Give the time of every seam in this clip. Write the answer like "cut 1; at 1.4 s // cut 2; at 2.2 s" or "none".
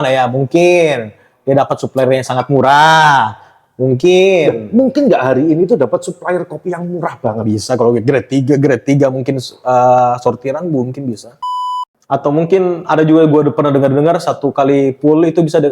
cut 1; at 11.6 s